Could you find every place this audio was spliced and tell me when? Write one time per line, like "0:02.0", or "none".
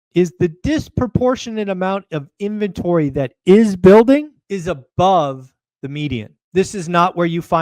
0:04.4
0:06.3